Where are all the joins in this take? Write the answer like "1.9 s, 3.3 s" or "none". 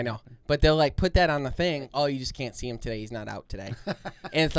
1.9 s